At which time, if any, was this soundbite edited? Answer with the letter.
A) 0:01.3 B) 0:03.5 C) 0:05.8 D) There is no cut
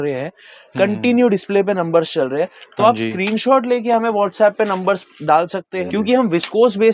C